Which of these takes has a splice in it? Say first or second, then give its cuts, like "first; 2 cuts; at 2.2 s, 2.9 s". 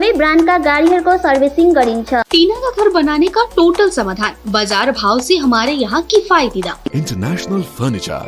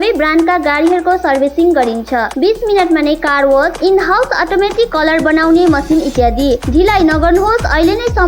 first; 2 cuts; at 2.3 s, 6.9 s